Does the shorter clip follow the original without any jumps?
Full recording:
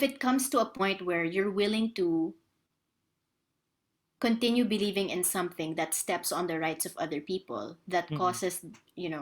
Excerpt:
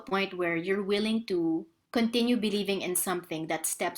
no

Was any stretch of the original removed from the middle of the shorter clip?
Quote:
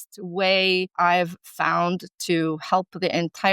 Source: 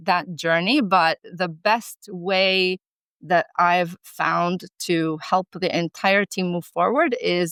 yes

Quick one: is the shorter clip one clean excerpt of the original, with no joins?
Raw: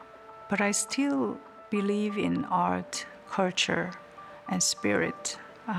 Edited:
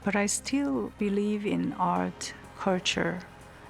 no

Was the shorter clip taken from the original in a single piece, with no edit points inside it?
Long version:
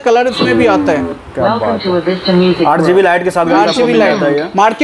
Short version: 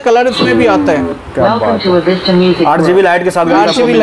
yes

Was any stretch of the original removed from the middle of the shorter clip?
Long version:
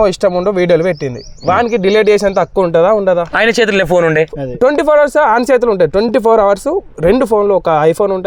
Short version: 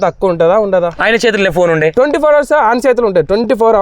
yes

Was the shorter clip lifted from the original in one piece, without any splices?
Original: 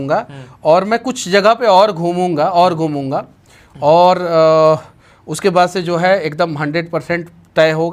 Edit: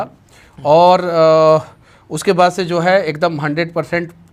yes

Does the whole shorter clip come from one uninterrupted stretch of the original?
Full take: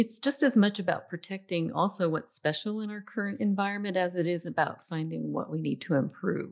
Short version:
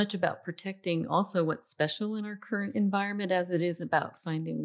yes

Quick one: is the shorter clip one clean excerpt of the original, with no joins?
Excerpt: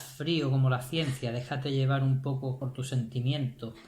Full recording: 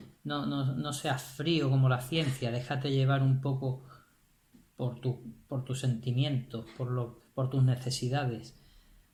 no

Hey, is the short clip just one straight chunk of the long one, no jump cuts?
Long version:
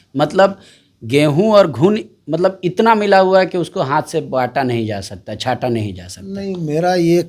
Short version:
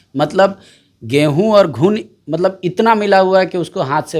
yes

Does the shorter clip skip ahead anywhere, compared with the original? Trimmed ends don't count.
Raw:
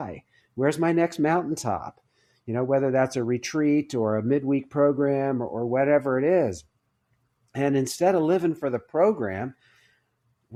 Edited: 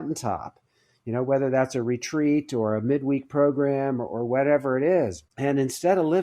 yes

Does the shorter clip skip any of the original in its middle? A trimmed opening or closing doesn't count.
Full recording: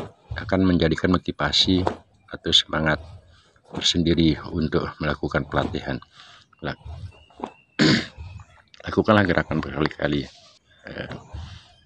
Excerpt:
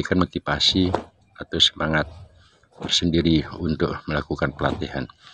no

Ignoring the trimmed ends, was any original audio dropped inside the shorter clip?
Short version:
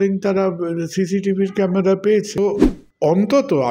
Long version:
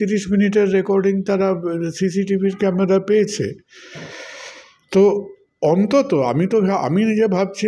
yes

